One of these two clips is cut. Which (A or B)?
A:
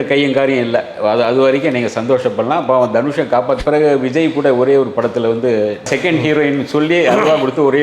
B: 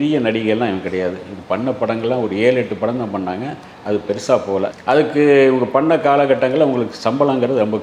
A